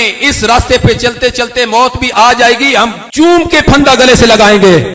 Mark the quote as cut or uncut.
uncut